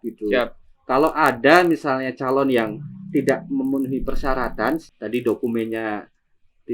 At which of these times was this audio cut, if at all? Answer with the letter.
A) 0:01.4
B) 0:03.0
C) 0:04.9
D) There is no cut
C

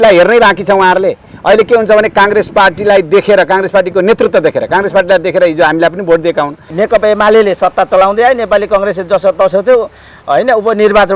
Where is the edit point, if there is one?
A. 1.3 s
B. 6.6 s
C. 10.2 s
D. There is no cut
B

